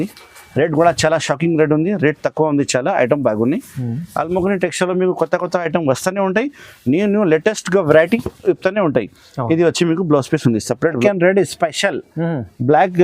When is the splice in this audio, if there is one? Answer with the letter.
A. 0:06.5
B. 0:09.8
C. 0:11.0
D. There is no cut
C